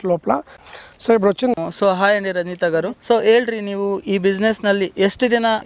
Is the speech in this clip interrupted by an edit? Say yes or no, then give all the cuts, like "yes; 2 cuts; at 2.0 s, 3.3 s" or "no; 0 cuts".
yes; 1 cut; at 1.5 s